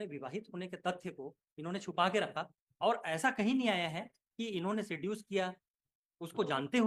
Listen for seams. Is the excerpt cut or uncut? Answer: uncut